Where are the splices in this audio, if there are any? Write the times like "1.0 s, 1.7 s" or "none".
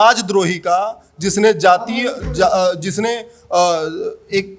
none